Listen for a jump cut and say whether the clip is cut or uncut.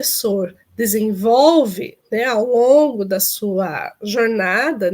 uncut